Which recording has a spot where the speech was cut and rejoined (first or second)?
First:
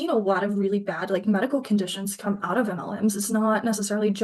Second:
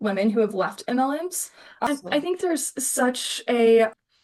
second